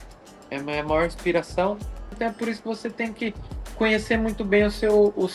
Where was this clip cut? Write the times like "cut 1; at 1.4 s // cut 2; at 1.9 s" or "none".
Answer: cut 1; at 2.1 s